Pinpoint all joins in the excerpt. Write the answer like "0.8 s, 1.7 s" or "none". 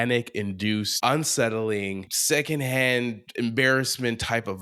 0.9 s, 2.1 s